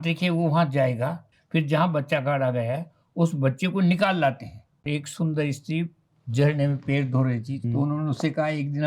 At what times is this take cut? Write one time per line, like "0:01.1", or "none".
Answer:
0:01.3
0:04.9
0:07.6